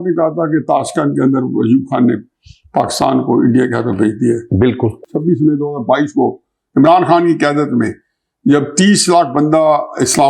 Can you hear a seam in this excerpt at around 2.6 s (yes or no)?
no